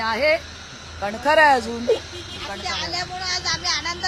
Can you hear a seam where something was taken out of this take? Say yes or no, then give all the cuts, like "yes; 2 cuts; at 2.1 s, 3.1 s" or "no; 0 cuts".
no; 0 cuts